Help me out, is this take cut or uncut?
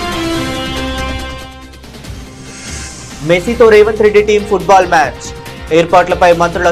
uncut